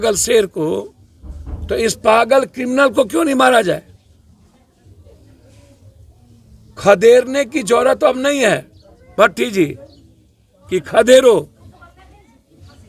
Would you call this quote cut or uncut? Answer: uncut